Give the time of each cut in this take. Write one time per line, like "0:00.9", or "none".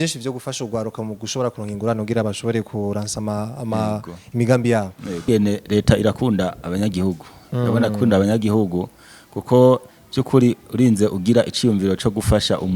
0:05.3